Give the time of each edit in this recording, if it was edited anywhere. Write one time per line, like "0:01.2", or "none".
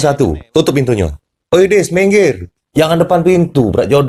none